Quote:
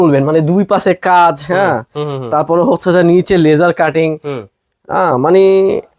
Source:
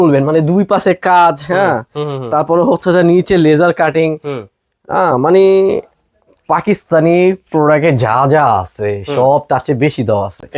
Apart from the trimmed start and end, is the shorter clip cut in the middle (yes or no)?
no